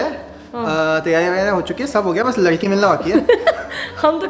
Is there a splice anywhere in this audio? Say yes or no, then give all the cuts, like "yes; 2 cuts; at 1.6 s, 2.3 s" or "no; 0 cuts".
no; 0 cuts